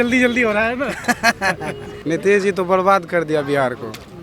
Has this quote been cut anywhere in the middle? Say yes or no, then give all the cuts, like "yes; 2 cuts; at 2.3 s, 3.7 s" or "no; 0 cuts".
yes; 1 cut; at 1.9 s